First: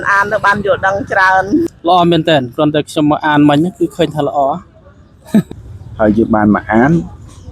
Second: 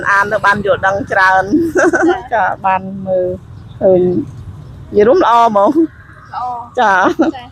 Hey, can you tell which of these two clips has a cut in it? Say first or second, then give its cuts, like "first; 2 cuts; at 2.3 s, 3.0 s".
first; 2 cuts; at 1.7 s, 5.5 s